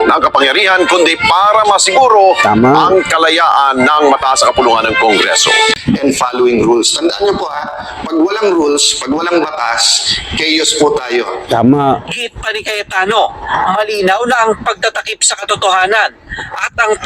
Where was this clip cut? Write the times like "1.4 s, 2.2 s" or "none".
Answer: 5.7 s